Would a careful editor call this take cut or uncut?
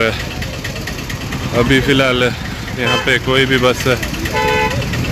uncut